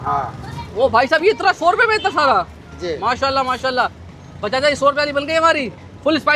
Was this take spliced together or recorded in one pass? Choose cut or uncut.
uncut